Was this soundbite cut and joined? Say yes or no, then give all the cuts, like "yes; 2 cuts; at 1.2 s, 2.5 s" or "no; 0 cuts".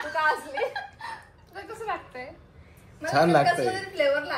no; 0 cuts